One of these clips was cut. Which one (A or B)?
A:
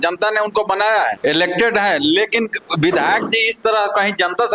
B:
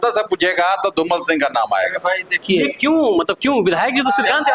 A